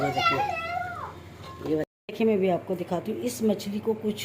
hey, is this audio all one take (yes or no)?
no